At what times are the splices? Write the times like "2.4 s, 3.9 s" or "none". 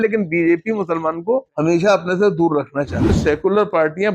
1.5 s, 3.2 s